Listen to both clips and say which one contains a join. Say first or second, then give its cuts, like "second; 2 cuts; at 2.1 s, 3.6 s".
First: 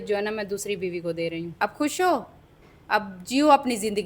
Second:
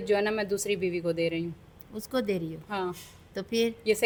first; 1 cut; at 1.5 s